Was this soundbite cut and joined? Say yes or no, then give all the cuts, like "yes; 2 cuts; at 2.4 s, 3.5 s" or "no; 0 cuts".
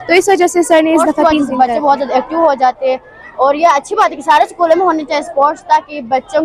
yes; 1 cut; at 1.4 s